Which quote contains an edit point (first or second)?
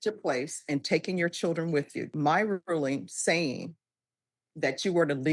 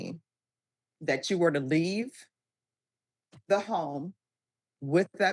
first